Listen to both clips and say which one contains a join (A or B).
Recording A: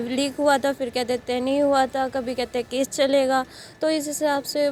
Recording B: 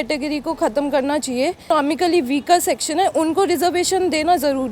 B